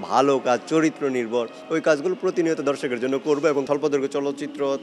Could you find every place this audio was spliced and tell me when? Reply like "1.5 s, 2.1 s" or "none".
3.6 s